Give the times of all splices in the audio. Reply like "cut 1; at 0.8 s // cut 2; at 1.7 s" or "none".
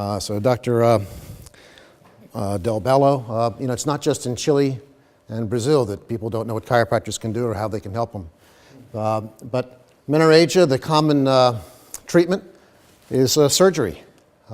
none